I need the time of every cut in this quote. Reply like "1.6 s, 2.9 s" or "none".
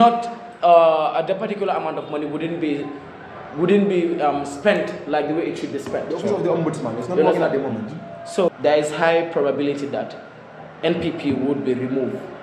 8.5 s